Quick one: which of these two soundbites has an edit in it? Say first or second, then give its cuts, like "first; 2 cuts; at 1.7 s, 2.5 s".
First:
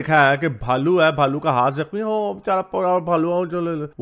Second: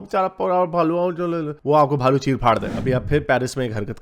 second; 1 cut; at 2.7 s